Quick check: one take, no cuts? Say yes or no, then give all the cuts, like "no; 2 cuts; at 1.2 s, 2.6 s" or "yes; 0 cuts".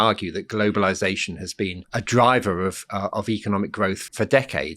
no; 2 cuts; at 1.8 s, 4.0 s